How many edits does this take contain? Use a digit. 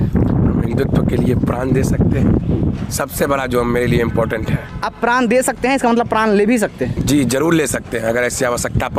0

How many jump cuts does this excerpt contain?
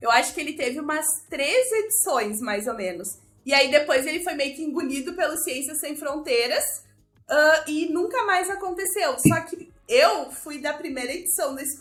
0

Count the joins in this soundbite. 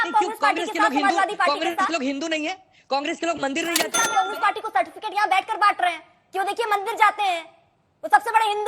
1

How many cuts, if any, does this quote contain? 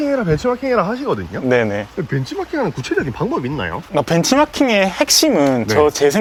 0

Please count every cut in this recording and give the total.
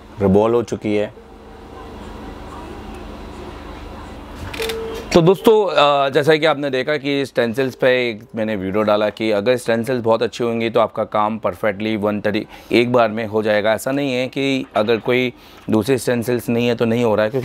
1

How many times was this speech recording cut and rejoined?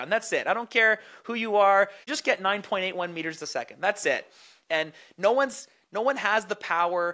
1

